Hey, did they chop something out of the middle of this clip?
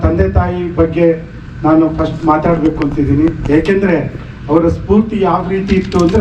no; 0 cuts

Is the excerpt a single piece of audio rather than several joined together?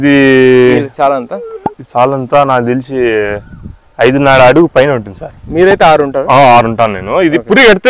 yes; 0 cuts

